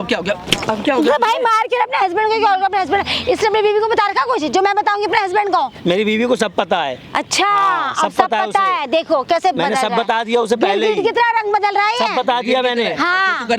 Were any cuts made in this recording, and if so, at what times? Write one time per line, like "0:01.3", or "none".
none